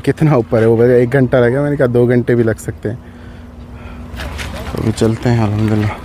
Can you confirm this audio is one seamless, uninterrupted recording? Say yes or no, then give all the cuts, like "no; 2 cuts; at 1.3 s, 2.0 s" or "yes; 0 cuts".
no; 1 cut; at 4.2 s